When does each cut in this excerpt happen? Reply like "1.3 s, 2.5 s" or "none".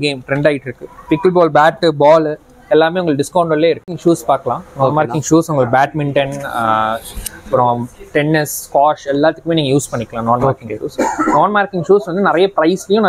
none